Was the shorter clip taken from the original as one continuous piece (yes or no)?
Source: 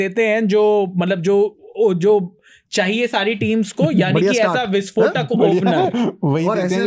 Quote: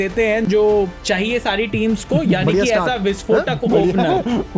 no